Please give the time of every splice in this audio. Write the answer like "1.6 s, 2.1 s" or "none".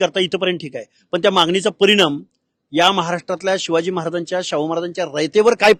none